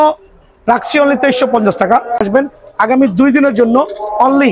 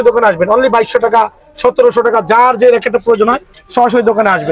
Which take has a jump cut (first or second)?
first